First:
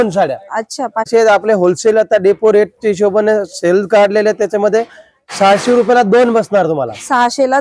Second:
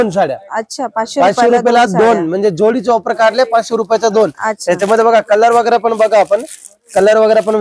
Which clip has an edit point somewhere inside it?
first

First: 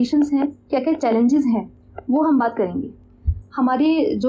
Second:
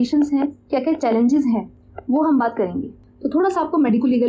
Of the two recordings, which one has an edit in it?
second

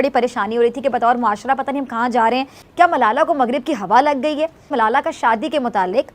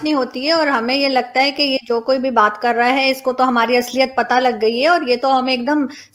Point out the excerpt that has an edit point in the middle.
first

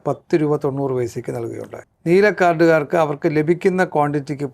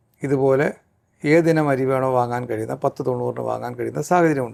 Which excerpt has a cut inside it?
first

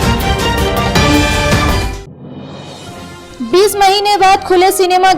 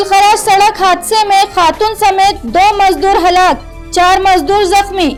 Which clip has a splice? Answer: first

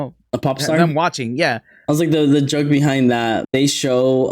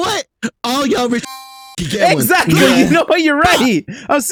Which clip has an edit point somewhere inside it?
first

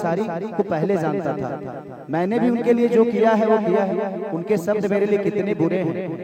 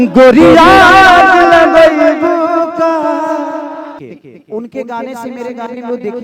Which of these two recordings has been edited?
second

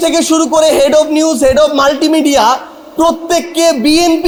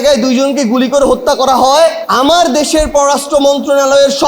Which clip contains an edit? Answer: second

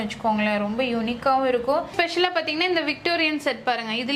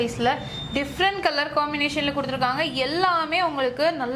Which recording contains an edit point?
first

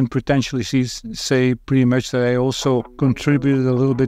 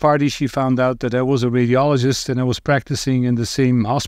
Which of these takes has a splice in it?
first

